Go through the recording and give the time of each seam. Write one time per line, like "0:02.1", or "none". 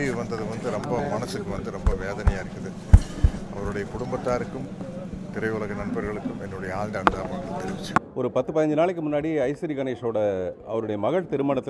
0:08.1